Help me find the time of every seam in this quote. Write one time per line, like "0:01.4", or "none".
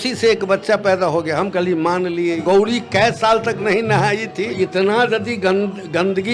0:02.4
0:04.5